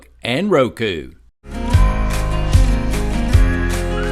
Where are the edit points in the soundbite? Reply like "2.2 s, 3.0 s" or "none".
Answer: 1.5 s